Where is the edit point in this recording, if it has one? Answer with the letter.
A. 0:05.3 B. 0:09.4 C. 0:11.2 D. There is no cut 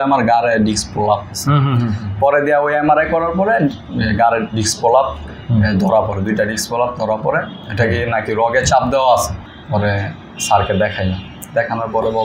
B